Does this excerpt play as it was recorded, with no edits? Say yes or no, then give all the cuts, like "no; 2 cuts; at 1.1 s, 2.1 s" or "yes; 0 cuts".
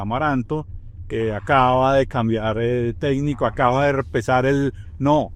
yes; 0 cuts